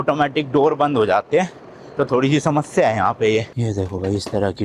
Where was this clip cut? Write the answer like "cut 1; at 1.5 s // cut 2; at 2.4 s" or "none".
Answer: cut 1; at 3.6 s